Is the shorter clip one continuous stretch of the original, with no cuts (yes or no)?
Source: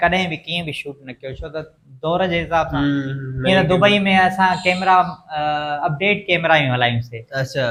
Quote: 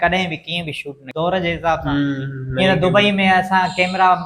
no